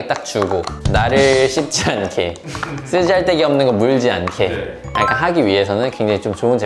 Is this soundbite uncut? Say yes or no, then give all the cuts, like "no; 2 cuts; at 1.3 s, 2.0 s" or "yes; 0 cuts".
yes; 0 cuts